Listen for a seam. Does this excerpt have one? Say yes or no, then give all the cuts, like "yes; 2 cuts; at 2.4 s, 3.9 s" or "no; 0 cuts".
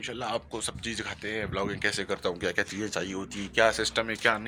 no; 0 cuts